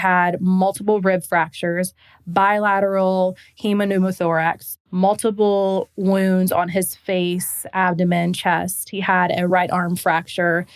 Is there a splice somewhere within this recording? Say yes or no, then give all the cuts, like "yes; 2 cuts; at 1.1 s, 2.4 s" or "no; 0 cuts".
yes; 2 cuts; at 4.6 s, 9.5 s